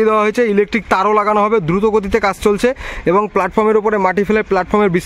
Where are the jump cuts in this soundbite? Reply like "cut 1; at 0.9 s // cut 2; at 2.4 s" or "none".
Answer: none